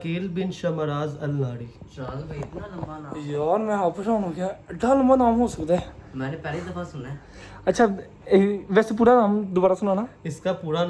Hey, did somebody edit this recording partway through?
no; 0 cuts

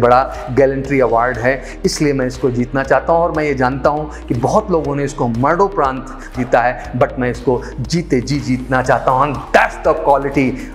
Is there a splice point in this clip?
yes; 1 cut; at 6.3 s

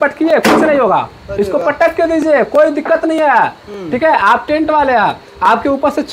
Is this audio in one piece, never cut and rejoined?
yes; 0 cuts

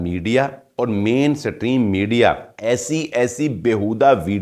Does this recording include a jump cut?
yes; 1 cut; at 2.5 s

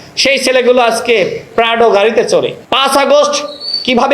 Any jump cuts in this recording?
yes; 1 cut; at 2.6 s

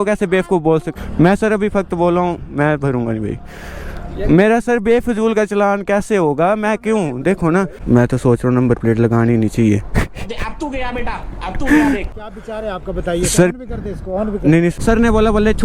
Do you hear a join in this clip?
yes; 4 cuts; at 0.9 s, 7.8 s, 12.2 s, 14.7 s

